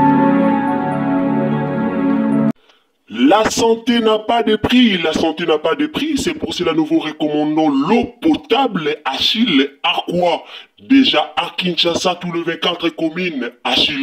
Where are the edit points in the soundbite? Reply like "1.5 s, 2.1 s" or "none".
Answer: 2.5 s